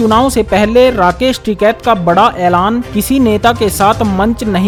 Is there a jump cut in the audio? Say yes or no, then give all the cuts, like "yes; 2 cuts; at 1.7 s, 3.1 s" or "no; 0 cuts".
no; 0 cuts